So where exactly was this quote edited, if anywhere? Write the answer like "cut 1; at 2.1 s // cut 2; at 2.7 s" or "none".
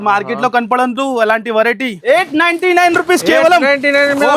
cut 1; at 1.9 s